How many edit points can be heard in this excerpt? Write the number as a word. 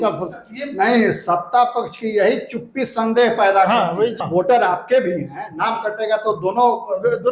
one